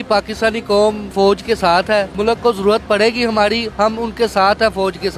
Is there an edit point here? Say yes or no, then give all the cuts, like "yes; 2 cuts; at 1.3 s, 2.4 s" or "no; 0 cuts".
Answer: yes; 2 cuts; at 1.1 s, 2.1 s